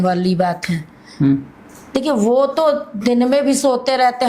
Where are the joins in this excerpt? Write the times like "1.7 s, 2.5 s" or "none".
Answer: none